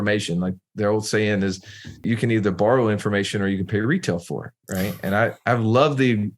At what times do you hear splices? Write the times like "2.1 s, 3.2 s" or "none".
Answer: 2.0 s